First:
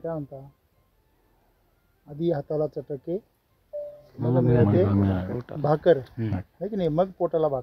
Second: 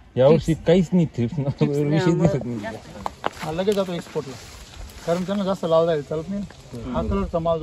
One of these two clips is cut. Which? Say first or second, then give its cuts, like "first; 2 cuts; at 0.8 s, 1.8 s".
second; 1 cut; at 2.6 s